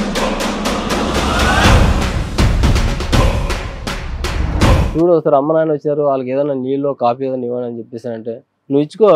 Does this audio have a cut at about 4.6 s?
yes; 1 cut; at 4.6 s

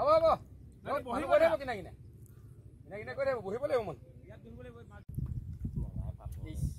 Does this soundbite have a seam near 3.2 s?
no; 1 cut; at 5.0 s

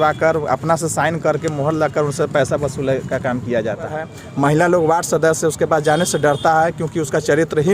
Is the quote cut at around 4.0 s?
yes; 1 cut; at 4.0 s

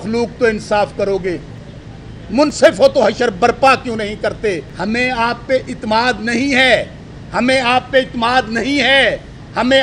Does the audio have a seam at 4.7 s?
yes; 1 cut; at 4.7 s

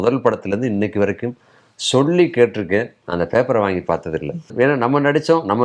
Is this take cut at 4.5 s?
yes; 1 cut; at 4.5 s

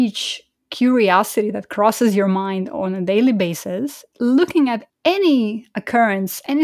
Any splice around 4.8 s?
yes; 1 cut; at 4.8 s

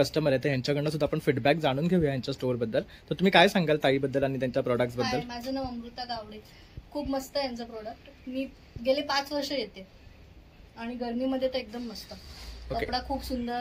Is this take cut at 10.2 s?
no; 0 cuts

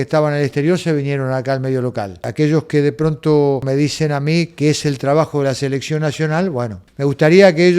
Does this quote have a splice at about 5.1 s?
no; 3 cuts; at 2.3 s, 3.6 s, 6.8 s

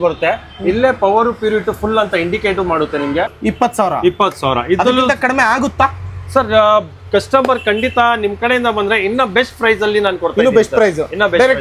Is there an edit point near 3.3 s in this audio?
yes; 1 cut; at 3.3 s

